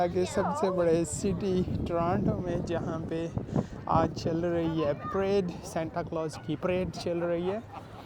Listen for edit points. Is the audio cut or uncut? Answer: cut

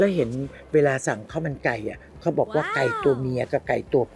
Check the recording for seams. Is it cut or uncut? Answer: uncut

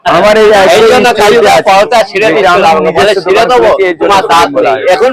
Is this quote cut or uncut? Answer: uncut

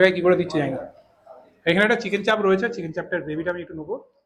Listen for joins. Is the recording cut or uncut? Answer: uncut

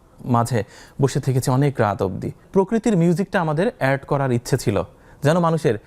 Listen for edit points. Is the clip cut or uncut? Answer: cut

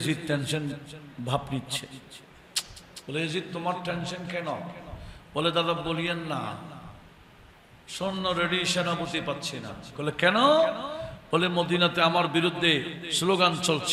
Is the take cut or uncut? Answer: uncut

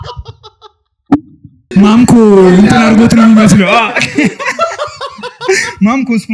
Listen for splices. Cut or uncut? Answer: cut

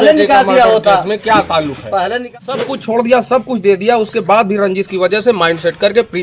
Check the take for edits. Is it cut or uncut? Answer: cut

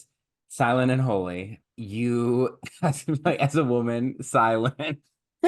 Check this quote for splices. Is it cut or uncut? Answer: cut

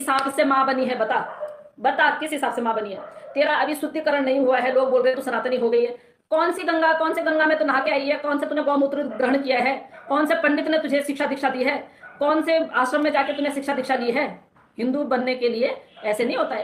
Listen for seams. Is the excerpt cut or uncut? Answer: uncut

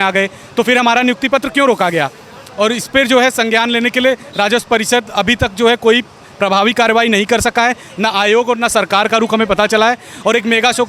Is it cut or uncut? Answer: uncut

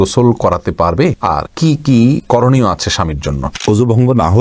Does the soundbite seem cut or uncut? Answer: cut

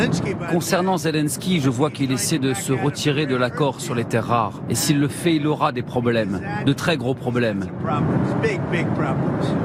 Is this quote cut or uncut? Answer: uncut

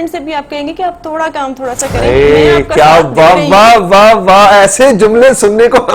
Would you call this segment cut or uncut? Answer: uncut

